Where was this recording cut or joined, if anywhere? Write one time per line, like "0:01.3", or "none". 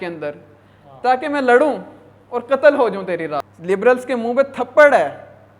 0:03.5